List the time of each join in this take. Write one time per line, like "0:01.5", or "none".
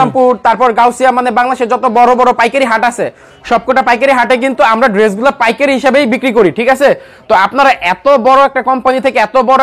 none